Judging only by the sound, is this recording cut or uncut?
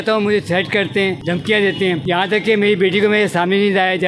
cut